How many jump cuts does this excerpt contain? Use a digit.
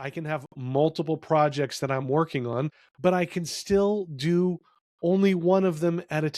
1